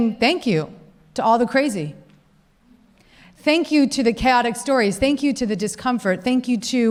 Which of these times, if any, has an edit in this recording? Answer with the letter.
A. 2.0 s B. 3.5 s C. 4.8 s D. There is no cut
D